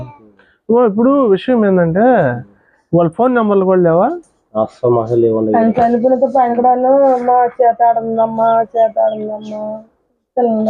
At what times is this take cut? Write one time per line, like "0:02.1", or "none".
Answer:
0:08.4